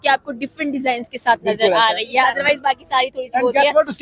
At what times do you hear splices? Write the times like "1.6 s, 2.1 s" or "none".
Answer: none